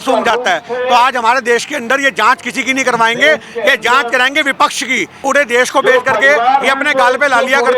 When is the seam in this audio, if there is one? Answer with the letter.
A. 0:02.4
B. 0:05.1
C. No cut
B